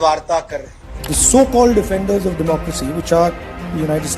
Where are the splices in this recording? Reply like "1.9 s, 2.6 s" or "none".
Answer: 1.0 s